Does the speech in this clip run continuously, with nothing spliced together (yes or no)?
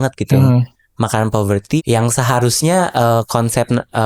no